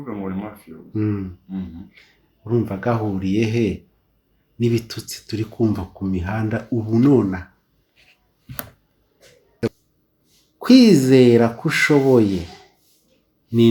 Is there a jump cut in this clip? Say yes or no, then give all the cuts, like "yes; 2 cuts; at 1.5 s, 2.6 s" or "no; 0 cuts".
yes; 1 cut; at 9.4 s